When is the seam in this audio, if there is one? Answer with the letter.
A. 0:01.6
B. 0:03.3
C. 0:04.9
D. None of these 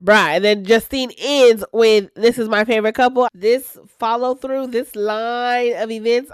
B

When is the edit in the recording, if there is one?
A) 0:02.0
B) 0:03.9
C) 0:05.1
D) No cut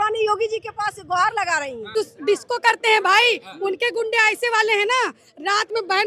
A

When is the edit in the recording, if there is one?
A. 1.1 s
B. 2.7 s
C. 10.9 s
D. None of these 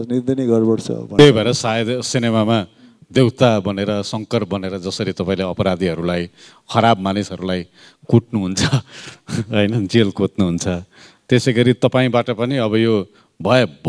A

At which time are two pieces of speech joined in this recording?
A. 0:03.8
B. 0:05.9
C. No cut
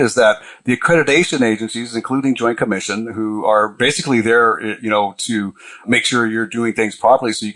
B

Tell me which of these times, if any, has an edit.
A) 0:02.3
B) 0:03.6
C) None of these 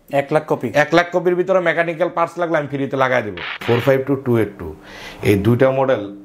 B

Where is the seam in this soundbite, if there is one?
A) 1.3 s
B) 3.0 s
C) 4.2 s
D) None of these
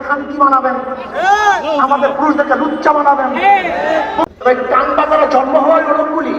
C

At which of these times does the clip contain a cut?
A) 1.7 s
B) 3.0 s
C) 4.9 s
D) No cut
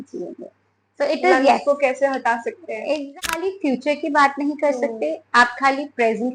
B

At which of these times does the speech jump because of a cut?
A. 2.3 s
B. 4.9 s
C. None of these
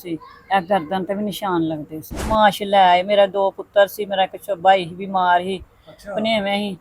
A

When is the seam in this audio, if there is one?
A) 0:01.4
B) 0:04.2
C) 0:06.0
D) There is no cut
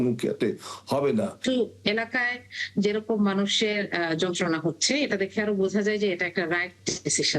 A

